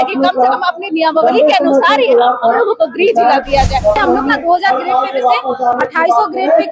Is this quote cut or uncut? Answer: cut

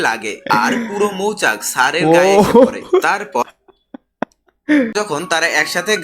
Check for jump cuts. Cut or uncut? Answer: cut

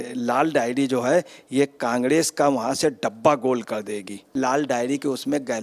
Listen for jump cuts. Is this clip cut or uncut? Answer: cut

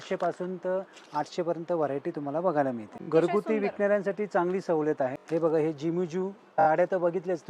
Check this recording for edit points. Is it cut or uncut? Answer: cut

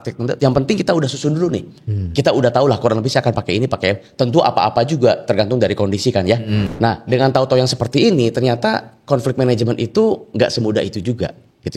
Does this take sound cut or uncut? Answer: cut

